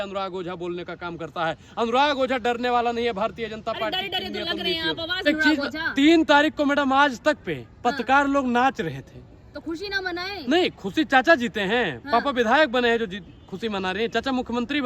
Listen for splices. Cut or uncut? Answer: cut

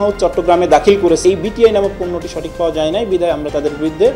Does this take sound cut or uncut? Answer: cut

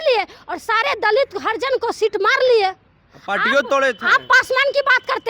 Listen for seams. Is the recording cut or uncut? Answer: uncut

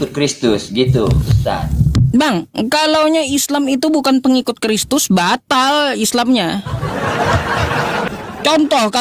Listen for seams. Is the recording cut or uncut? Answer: cut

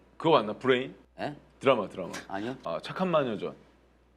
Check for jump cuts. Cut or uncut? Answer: cut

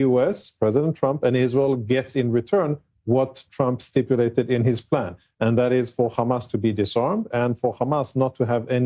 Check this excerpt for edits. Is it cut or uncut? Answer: uncut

